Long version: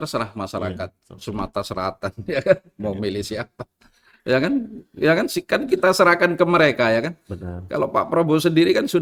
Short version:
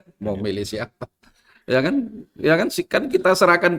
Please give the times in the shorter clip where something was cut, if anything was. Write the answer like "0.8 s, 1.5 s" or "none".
none